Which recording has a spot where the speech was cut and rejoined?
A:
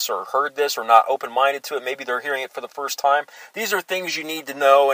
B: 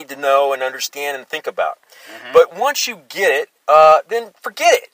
B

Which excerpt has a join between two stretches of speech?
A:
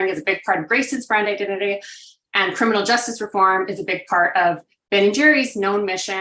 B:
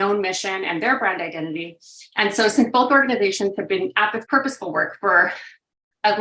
B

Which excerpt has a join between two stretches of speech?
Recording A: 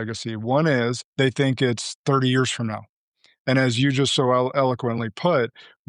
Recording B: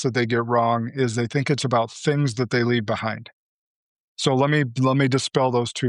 A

